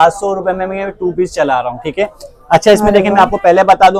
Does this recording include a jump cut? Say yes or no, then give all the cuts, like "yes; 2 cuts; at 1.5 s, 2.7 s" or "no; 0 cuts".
no; 0 cuts